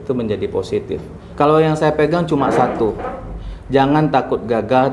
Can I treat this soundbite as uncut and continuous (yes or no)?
no